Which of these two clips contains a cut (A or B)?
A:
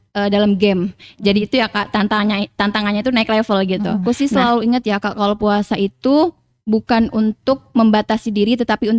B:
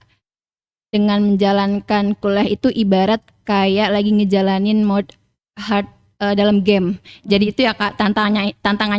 A